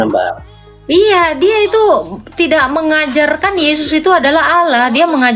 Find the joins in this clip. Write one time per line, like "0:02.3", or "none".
none